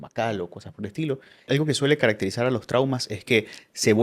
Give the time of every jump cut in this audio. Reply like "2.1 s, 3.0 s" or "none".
1.5 s

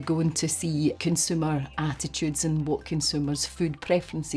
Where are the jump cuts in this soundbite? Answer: 1.0 s

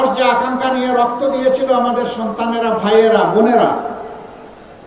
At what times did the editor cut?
none

